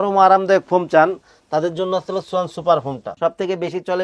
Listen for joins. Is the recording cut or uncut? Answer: cut